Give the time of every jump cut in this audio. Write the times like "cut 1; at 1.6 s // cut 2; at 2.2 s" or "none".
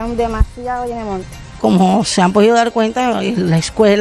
cut 1; at 1.5 s